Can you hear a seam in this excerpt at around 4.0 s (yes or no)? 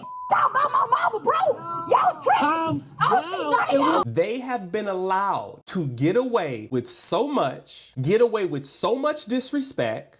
yes